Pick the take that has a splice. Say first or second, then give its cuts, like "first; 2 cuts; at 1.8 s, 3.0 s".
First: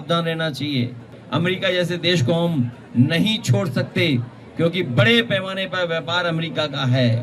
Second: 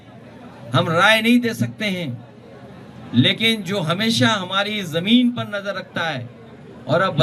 first; 1 cut; at 1.2 s